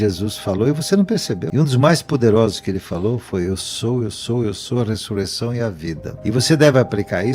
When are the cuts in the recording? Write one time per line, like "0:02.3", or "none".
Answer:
0:01.7
0:06.1